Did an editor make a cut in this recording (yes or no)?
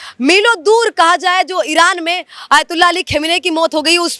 no